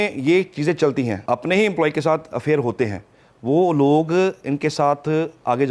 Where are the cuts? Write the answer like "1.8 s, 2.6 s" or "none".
1.2 s